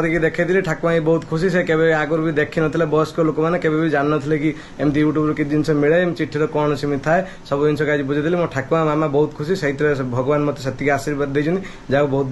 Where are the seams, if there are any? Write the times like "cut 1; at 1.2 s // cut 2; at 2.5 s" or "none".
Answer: none